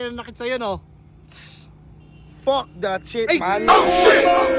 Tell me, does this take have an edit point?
no; 0 cuts

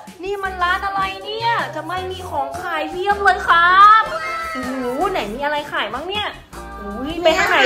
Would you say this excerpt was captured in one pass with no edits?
yes; 0 cuts

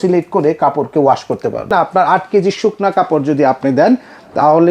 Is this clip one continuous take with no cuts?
no; 1 cut; at 1.7 s

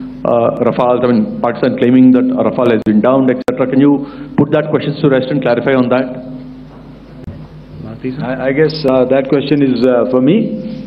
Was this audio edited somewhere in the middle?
no; 0 cuts

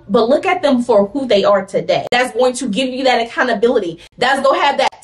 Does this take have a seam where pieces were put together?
yes; 1 cut; at 2.1 s

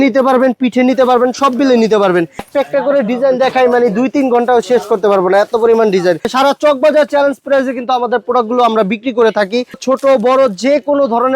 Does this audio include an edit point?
yes; 3 cuts; at 2.5 s, 6.3 s, 9.8 s

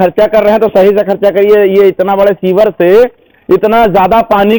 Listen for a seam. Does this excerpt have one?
no; 0 cuts

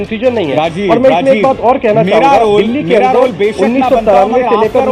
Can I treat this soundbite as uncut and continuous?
yes; 0 cuts

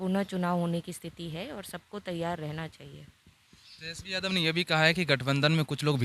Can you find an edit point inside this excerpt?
no; 0 cuts

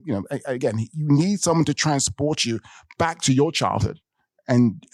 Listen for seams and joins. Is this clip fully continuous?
yes; 0 cuts

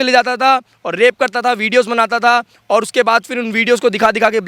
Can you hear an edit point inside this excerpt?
no; 0 cuts

